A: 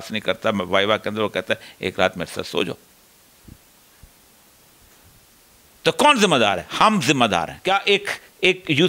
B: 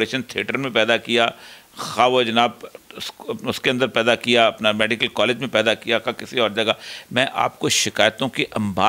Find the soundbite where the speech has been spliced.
A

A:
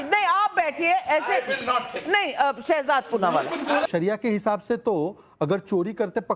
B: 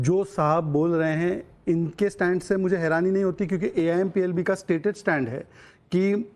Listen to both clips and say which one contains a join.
A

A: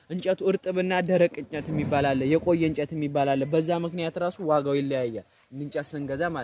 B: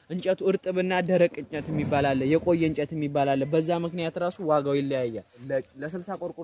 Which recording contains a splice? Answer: B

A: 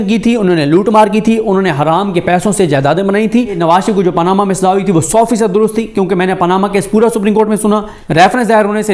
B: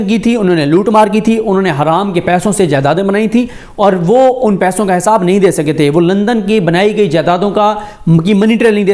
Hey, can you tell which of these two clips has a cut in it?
A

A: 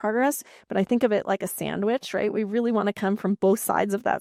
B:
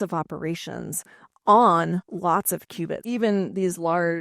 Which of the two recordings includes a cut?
B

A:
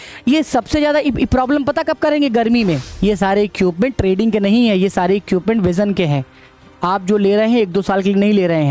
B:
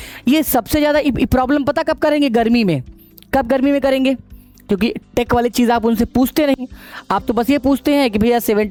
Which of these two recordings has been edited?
A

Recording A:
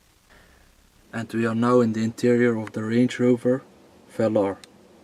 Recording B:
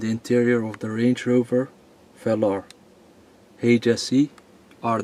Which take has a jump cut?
A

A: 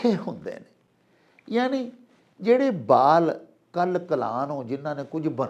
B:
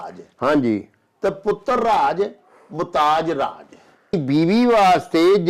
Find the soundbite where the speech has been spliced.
B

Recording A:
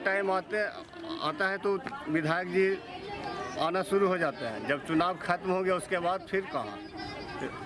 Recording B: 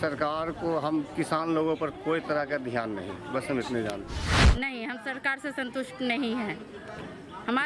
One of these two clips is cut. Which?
B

